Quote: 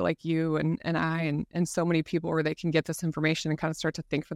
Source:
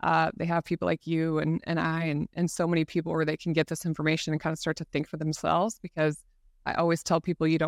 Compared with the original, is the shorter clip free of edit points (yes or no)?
yes